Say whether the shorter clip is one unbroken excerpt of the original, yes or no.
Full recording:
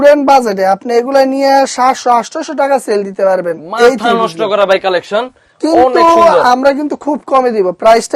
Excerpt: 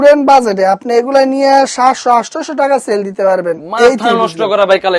yes